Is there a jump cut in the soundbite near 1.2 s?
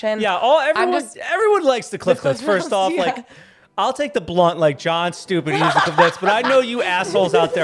yes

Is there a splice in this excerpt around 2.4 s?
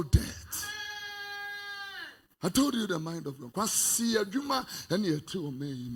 no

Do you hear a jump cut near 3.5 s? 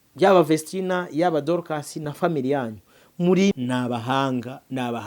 yes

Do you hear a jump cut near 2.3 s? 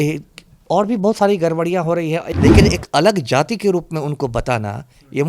yes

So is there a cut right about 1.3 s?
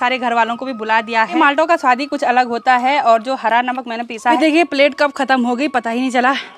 yes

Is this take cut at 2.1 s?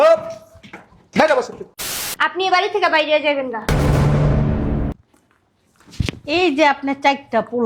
yes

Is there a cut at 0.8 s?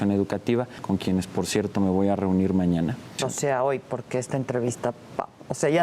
yes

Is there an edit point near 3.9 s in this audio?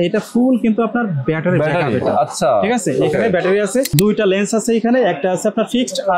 yes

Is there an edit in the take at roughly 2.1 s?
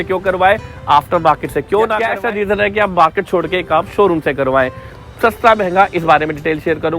yes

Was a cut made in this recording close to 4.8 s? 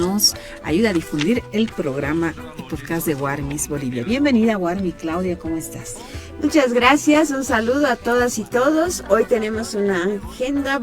yes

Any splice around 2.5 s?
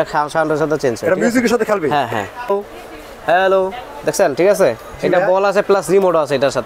yes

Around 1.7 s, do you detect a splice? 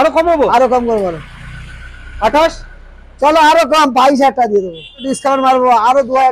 no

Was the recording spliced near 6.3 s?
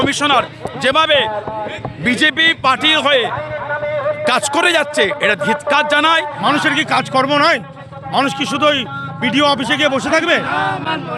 yes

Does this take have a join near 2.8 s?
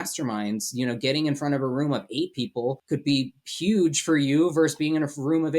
yes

